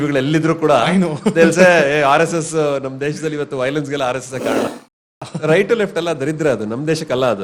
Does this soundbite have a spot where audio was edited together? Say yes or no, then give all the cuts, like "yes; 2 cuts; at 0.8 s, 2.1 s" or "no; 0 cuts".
yes; 1 cut; at 4.7 s